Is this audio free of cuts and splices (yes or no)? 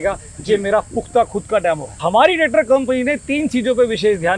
no